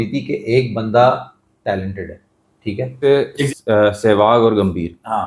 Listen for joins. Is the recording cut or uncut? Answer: cut